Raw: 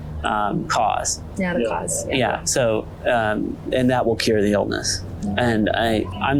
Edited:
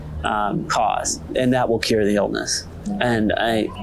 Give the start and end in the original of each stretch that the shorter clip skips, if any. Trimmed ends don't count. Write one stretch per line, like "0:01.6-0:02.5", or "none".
0:01.2-0:03.6